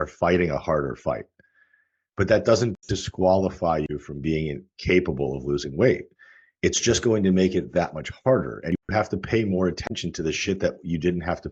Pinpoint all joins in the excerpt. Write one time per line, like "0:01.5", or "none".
none